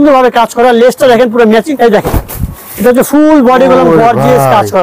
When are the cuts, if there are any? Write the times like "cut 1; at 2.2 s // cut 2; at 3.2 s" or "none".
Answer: cut 1; at 1.7 s